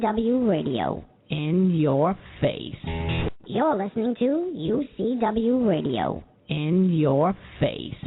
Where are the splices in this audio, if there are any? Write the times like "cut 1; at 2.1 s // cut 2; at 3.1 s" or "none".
cut 1; at 3.3 s